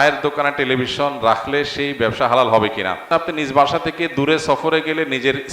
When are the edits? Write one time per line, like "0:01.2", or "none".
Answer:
0:03.0